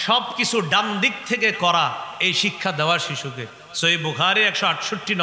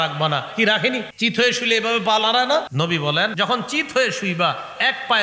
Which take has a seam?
second; 2 cuts; at 1.1 s, 3.2 s

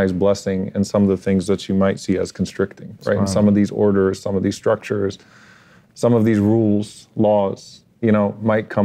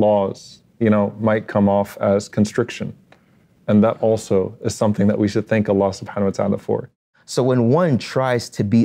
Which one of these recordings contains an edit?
second; 1 cut; at 6.9 s

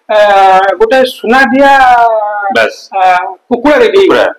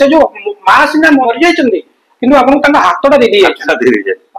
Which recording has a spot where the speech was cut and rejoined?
second; 1 cut; at 1.2 s

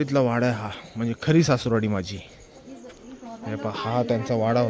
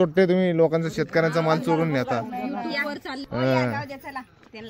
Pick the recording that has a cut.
second; 1 cut; at 3.2 s

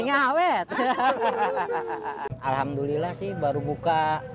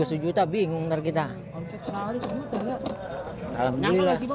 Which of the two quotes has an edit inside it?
first; 1 cut; at 2.2 s

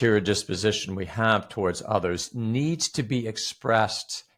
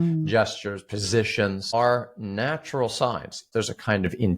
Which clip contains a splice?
second; 2 cuts; at 1.7 s, 3.5 s

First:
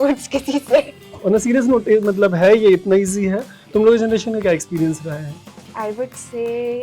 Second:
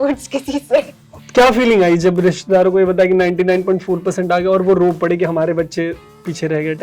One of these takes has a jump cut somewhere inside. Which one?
second; 1 cut; at 1.0 s

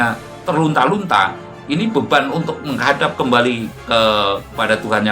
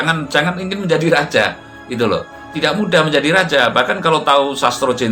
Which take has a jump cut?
first; 1 cut; at 3.7 s

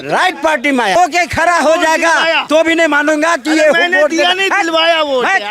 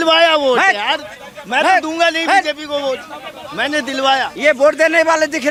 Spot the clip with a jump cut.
first; 1 cut; at 1.0 s

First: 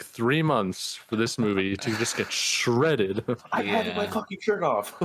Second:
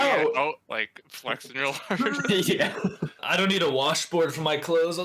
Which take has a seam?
second; 1 cut; at 3.2 s

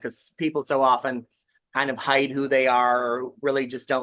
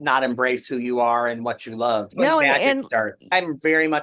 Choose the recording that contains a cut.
second; 2 cuts; at 2.1 s, 3.3 s

